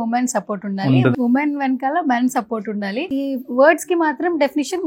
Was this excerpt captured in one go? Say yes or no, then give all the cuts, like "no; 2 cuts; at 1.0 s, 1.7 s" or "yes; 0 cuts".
no; 2 cuts; at 1.1 s, 3.1 s